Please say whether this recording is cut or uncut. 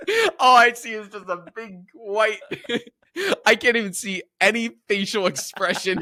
uncut